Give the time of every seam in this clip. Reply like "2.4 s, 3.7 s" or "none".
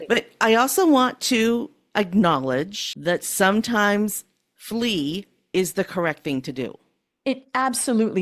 2.8 s